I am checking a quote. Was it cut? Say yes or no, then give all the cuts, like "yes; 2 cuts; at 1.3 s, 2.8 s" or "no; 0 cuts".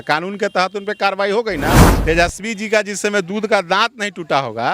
yes; 1 cut; at 1.8 s